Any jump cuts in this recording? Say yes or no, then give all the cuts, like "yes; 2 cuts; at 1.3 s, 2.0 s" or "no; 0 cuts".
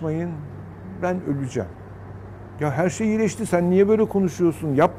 no; 0 cuts